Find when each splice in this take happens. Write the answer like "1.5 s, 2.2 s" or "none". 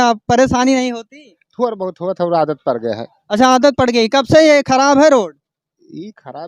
none